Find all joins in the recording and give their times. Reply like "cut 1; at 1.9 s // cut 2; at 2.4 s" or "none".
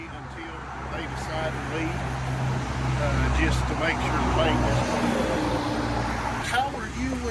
cut 1; at 6.4 s